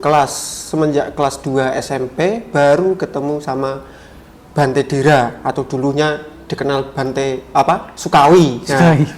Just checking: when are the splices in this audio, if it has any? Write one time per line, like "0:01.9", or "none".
none